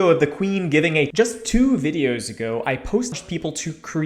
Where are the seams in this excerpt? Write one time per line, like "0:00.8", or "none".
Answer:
0:01.1
0:03.1